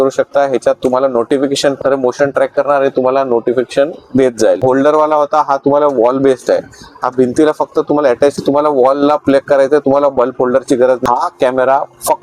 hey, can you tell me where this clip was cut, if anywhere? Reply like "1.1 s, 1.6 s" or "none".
1.8 s, 4.6 s, 8.4 s, 11.0 s